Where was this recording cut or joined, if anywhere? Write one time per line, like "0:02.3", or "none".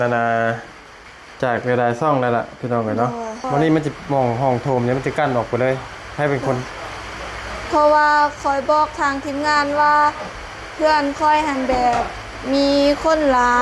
0:03.4